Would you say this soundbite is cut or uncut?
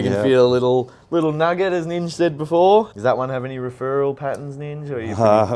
cut